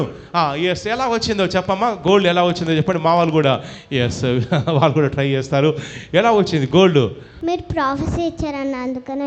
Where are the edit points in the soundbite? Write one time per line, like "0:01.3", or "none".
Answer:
0:07.3